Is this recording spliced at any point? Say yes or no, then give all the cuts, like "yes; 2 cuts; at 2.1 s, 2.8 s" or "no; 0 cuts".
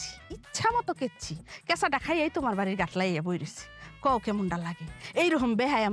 no; 0 cuts